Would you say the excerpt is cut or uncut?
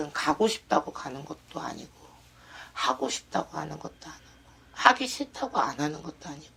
uncut